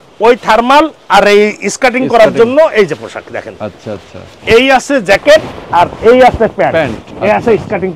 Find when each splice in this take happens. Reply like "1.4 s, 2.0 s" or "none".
7.0 s